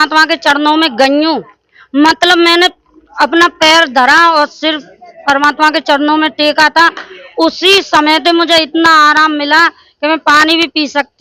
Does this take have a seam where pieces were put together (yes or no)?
no